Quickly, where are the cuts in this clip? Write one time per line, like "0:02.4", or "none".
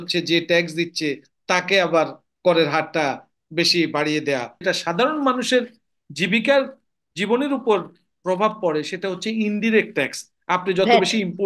0:04.6